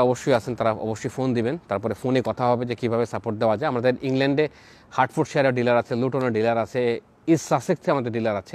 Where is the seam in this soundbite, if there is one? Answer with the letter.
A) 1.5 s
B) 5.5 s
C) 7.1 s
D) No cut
D